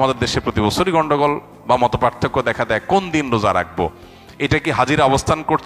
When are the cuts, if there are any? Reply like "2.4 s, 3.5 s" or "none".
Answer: none